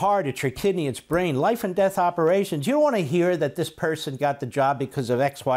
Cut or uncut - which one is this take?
uncut